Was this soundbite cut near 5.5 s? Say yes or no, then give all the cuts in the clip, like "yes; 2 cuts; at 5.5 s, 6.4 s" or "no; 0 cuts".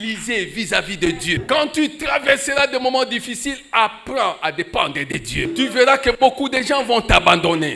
yes; 2 cuts; at 1.4 s, 5.5 s